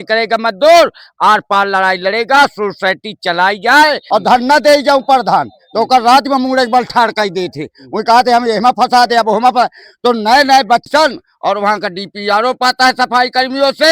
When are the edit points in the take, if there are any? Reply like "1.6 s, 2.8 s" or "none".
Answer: 4.0 s, 10.8 s